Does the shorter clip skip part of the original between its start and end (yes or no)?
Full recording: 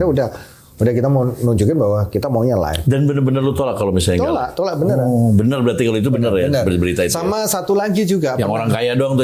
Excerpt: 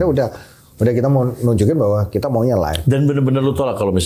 no